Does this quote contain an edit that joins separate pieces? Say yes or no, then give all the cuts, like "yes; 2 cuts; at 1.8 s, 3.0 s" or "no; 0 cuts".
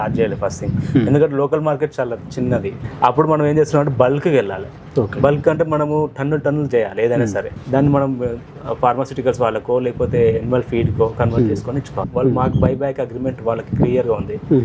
yes; 3 cuts; at 2.8 s, 7.6 s, 12.0 s